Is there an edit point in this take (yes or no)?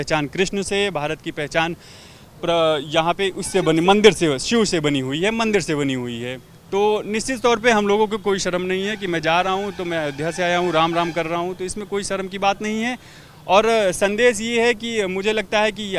no